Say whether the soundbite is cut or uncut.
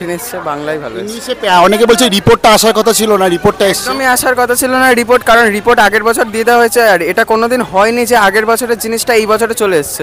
uncut